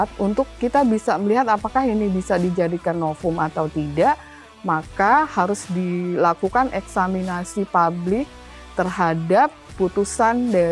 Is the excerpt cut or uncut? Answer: uncut